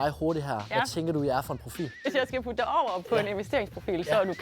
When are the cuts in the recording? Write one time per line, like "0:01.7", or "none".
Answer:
0:02.1